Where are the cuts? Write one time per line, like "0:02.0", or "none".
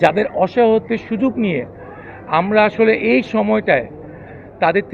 none